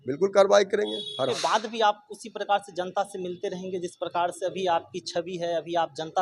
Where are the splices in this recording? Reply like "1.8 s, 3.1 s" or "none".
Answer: 1.3 s